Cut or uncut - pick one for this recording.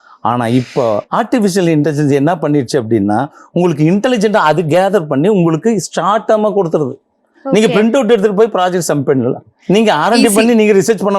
uncut